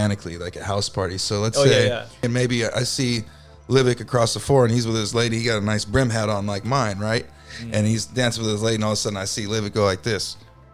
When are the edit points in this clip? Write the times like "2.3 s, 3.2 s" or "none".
2.2 s